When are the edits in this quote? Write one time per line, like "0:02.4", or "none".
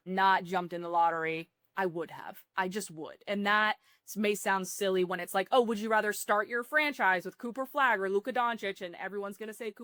none